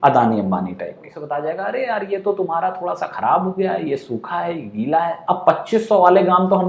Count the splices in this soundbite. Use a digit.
1